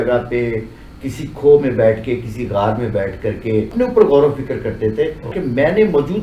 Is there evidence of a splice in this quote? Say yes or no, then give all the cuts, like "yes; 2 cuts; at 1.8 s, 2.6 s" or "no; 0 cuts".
yes; 2 cuts; at 3.7 s, 5.3 s